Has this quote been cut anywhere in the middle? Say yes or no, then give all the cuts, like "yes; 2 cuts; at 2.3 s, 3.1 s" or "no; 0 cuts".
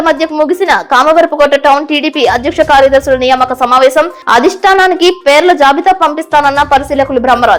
no; 0 cuts